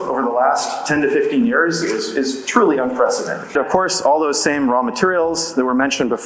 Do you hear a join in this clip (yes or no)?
yes